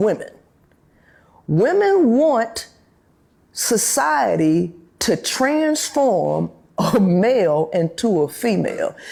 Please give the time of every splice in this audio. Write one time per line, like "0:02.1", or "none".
none